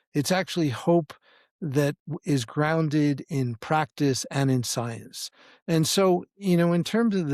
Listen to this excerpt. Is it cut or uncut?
uncut